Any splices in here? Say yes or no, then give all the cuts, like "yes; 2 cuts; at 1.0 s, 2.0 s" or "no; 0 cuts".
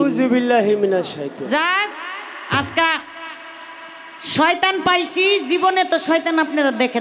yes; 1 cut; at 1.3 s